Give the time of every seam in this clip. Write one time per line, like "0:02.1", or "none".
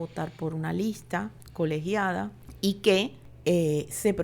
0:01.4
0:02.4
0:03.2